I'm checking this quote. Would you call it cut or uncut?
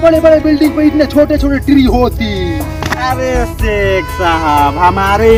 uncut